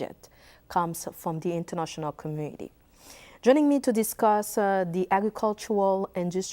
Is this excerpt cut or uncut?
cut